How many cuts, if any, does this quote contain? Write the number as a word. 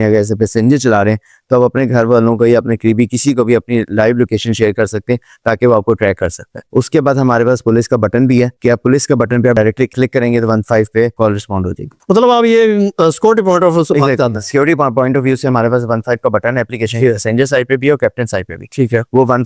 zero